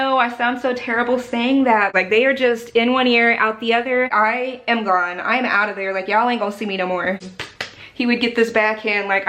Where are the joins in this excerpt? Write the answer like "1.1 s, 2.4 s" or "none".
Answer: 1.9 s, 4.1 s, 7.3 s